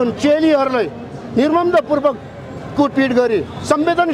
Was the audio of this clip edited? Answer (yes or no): no